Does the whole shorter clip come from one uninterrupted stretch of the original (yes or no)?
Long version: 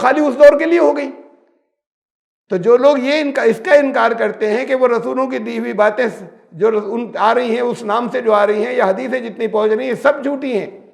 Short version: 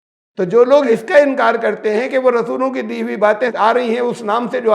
no